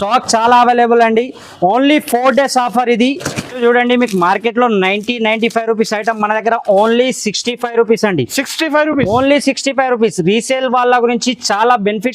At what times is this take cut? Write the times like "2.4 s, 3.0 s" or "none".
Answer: 3.5 s